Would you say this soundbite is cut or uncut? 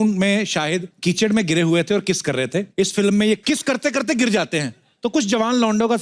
cut